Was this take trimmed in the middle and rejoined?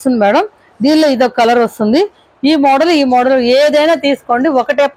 no; 0 cuts

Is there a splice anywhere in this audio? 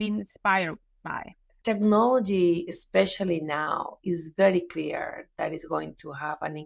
yes; 1 cut; at 1.5 s

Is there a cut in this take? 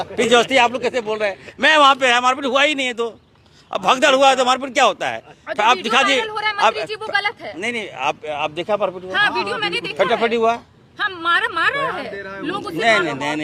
no; 0 cuts

